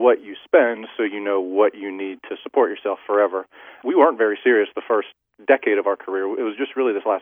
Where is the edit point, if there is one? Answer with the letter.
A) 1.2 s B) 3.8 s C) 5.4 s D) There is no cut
B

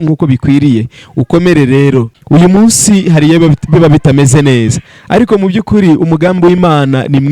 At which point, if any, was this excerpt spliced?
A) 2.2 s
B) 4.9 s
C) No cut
A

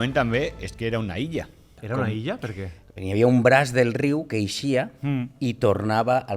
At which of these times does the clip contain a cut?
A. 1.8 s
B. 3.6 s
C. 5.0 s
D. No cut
A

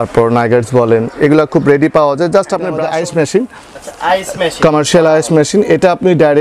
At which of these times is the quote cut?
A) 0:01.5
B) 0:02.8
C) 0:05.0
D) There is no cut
B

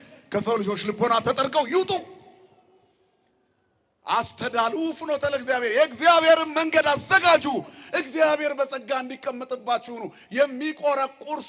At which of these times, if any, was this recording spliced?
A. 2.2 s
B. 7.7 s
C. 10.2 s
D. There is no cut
D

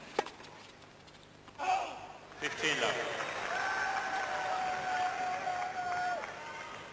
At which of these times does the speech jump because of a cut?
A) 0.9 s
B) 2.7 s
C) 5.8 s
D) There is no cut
C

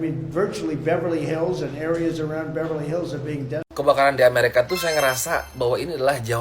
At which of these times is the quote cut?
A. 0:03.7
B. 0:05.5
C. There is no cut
A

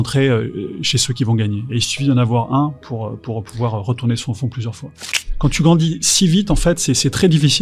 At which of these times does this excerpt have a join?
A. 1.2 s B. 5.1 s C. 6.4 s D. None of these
B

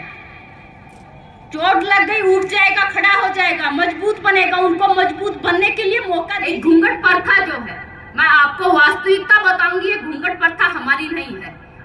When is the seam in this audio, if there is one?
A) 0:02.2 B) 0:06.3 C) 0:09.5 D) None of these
B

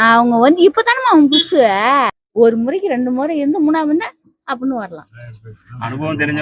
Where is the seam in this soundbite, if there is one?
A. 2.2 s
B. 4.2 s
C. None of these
A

